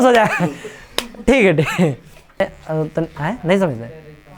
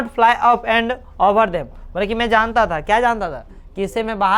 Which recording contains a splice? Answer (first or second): first